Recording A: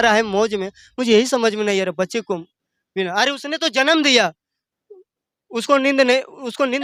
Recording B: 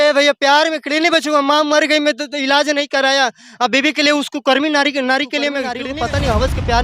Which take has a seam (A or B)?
B